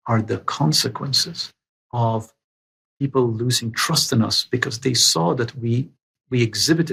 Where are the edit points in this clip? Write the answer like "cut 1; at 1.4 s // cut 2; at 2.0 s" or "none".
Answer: none